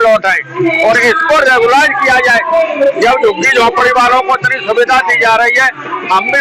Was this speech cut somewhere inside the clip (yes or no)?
no